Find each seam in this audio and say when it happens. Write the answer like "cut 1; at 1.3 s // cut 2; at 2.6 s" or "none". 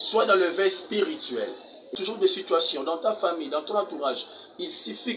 cut 1; at 1.9 s